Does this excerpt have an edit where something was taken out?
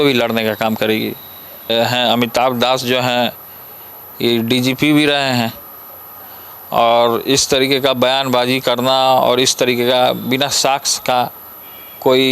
yes; 1 cut; at 1.7 s

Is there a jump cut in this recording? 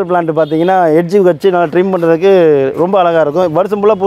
no; 0 cuts

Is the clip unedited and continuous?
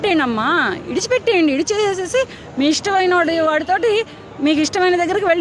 yes; 0 cuts

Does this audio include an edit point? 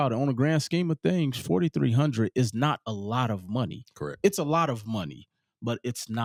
no; 0 cuts

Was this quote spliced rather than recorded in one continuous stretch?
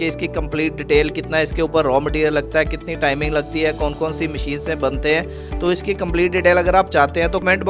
no; 0 cuts

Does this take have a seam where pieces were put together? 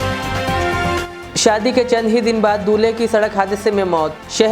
yes; 1 cut; at 1.1 s

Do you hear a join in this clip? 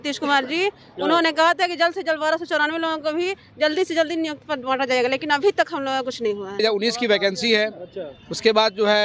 yes; 1 cut; at 6.6 s

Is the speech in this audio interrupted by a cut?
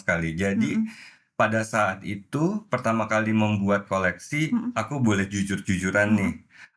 no; 0 cuts

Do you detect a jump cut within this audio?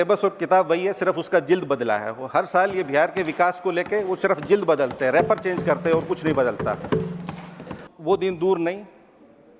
yes; 1 cut; at 7.8 s

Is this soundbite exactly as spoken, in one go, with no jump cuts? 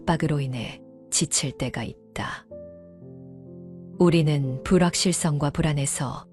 yes; 0 cuts

